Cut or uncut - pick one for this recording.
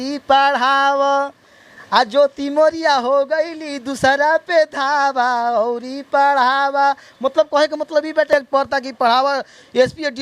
cut